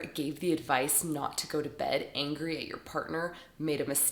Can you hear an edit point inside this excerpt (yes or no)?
no